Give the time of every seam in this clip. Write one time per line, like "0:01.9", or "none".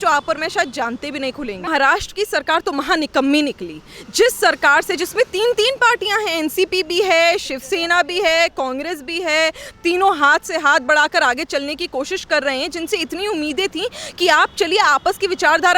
0:01.7